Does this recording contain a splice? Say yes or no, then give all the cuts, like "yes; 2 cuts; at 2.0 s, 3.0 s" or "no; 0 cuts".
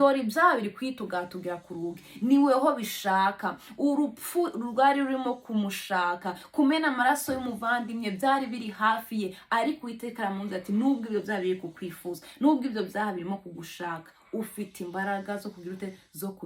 no; 0 cuts